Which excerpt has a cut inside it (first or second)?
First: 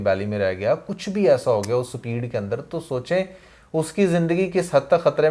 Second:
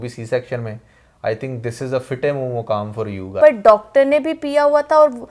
second